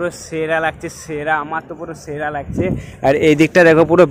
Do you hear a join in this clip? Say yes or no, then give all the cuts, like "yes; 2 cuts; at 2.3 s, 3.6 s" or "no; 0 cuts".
no; 0 cuts